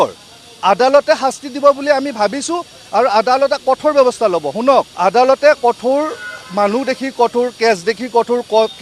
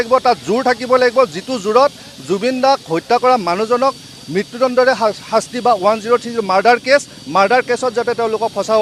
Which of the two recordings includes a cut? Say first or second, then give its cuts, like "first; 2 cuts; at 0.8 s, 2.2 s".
first; 1 cut; at 4.9 s